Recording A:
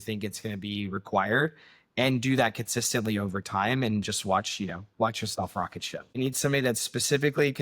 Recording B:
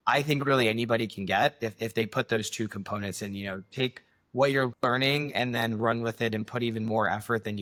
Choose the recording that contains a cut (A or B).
A